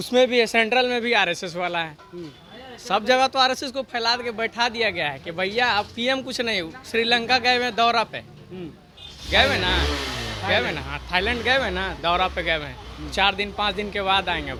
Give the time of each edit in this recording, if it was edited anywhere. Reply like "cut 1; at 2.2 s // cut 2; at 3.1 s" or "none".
none